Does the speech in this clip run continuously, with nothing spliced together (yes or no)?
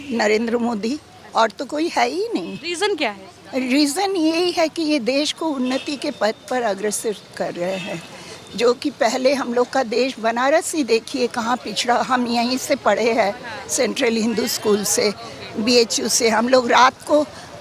yes